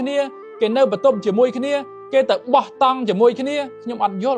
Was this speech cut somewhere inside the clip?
no; 0 cuts

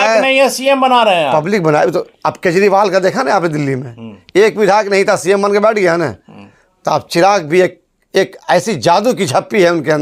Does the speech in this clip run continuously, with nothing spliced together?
yes; 0 cuts

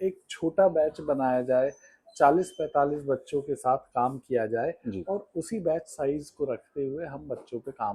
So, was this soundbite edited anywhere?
no; 0 cuts

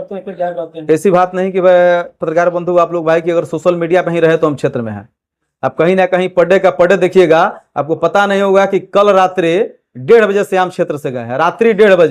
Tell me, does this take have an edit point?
no; 0 cuts

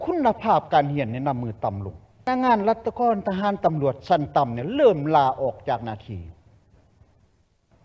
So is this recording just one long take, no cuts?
no; 1 cut; at 2.2 s

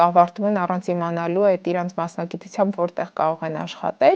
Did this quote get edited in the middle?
no; 0 cuts

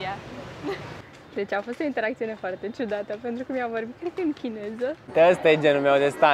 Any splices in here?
yes; 2 cuts; at 1.0 s, 5.0 s

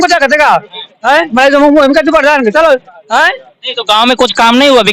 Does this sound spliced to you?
yes; 1 cut; at 2.9 s

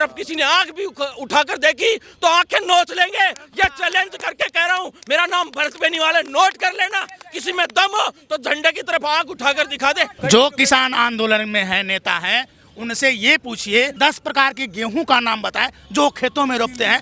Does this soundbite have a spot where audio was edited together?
yes; 2 cuts; at 10.1 s, 13.9 s

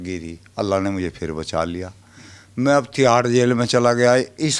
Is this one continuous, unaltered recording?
yes; 0 cuts

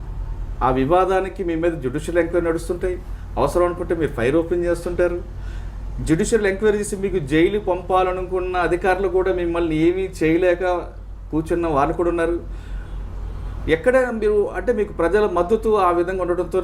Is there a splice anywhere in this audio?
no; 0 cuts

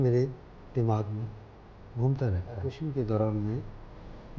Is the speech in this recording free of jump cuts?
no; 1 cut; at 2.8 s

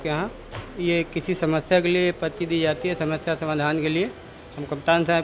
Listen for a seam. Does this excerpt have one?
no; 0 cuts

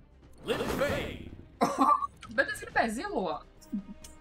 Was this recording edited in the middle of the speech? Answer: no; 0 cuts

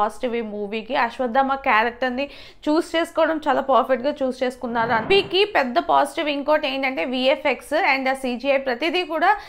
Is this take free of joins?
no; 1 cut; at 5.0 s

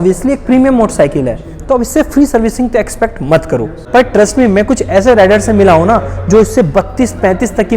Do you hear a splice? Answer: yes; 1 cut; at 3.8 s

